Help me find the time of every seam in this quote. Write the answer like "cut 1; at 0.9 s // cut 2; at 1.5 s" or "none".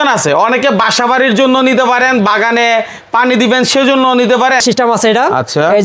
cut 1; at 4.6 s

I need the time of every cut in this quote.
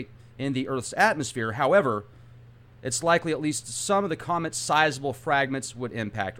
none

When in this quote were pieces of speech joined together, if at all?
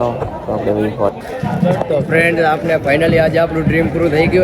cut 1; at 1.2 s

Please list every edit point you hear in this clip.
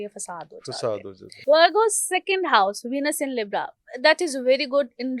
cut 1; at 1.3 s

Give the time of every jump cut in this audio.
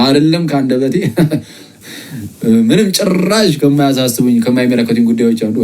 cut 1; at 1.7 s

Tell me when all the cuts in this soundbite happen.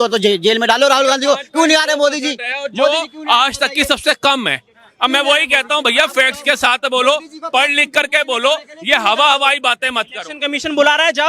none

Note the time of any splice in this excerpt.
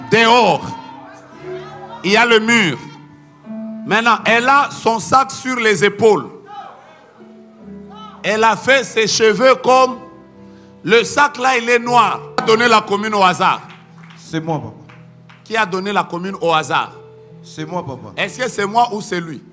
cut 1; at 12.4 s

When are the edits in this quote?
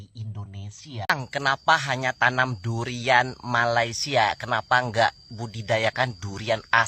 cut 1; at 1.1 s

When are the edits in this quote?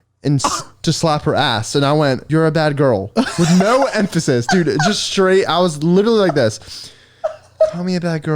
cut 1; at 2.2 s

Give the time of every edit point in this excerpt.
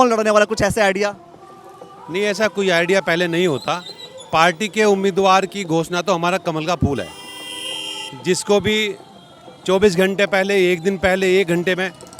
none

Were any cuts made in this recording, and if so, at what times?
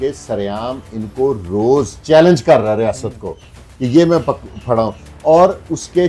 none

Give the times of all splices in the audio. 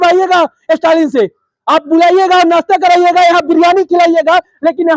none

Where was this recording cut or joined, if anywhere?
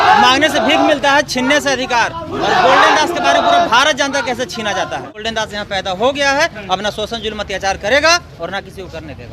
cut 1; at 5.1 s

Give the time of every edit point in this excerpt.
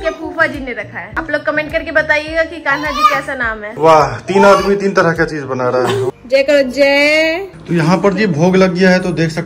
cut 1; at 1.0 s // cut 2; at 3.6 s // cut 3; at 6.1 s // cut 4; at 7.5 s

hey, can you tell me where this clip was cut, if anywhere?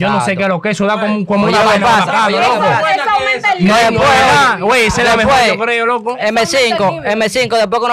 none

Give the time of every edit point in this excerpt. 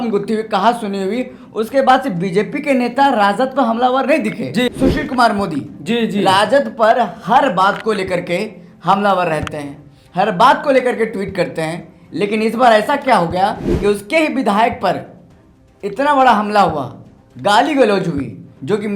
cut 1; at 4.7 s

